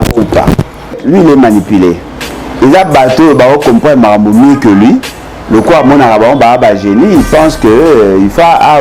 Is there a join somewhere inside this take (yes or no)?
yes